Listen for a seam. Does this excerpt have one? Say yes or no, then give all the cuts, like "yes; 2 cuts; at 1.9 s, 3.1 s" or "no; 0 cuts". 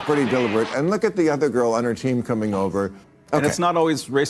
yes; 1 cut; at 2.9 s